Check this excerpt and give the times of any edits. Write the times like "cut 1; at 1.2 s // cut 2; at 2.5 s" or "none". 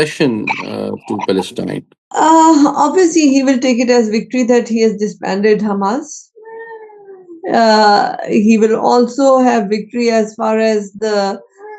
none